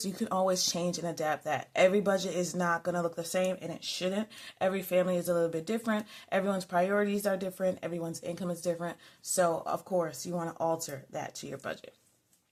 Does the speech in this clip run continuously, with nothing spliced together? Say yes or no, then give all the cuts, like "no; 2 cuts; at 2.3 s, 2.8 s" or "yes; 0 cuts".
yes; 0 cuts